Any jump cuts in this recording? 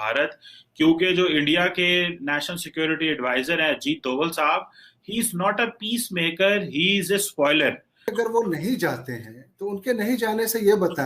yes; 1 cut; at 8.1 s

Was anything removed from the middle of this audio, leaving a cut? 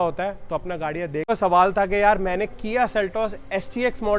yes; 1 cut; at 1.2 s

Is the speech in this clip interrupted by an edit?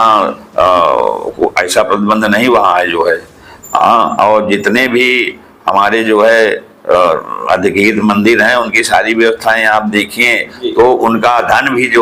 no; 0 cuts

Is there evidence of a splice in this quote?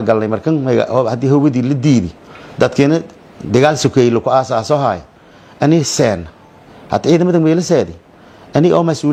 no; 0 cuts

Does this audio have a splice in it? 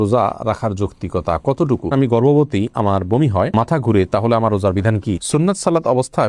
yes; 2 cuts; at 1.9 s, 5.2 s

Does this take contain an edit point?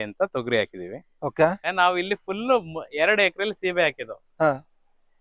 yes; 1 cut; at 1.6 s

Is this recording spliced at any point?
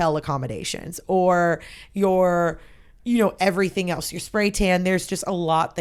no; 0 cuts

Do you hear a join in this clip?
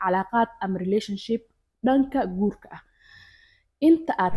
no; 0 cuts

